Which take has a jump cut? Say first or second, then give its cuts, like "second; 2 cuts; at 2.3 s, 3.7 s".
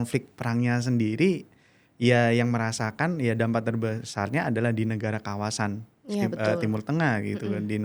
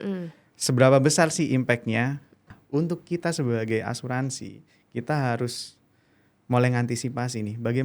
second; 1 cut; at 2.6 s